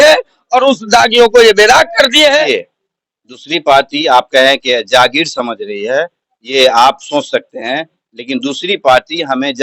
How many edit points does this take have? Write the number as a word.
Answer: one